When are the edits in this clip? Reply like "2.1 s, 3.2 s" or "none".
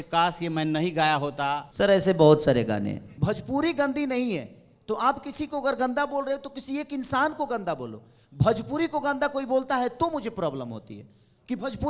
1.7 s, 3.1 s